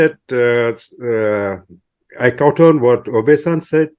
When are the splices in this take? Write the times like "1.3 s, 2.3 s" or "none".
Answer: none